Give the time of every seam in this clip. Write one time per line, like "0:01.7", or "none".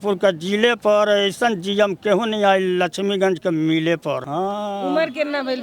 0:04.2

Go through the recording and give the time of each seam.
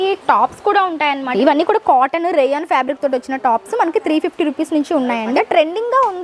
0:01.3
0:05.3

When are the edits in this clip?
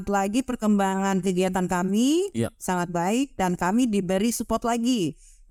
none

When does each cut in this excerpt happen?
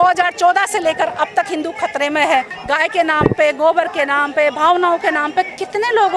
0:02.5

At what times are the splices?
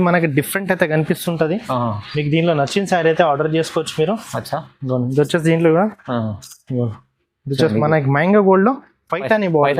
none

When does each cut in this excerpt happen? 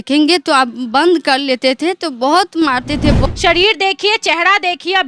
0:03.2

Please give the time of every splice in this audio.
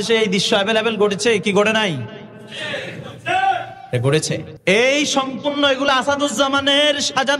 0:04.5

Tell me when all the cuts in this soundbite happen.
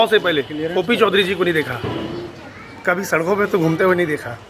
none

